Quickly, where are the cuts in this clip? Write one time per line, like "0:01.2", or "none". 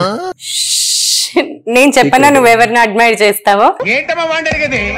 none